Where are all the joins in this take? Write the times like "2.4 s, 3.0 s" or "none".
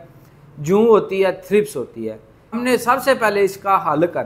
2.6 s